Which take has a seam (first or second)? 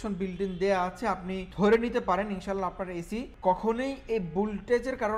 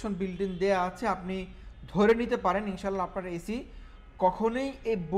first